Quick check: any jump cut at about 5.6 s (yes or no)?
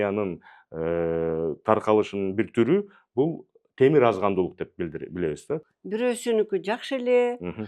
yes